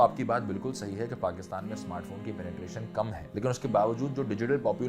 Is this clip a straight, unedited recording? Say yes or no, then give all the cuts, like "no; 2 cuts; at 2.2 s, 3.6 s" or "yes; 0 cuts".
no; 1 cut; at 3.2 s